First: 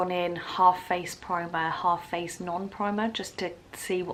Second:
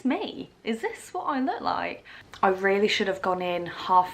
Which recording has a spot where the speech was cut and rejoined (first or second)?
second